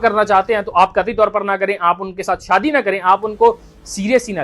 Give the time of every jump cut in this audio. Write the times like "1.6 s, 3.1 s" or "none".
none